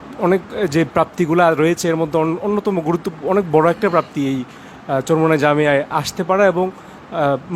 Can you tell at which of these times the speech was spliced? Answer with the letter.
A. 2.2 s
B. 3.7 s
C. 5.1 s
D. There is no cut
D